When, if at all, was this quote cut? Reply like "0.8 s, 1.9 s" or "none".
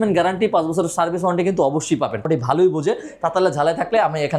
2.2 s